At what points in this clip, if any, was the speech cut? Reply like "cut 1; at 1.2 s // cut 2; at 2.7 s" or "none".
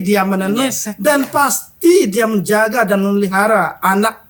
none